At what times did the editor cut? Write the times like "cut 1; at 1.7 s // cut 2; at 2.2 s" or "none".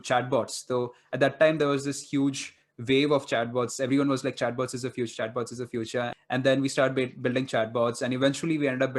cut 1; at 6.1 s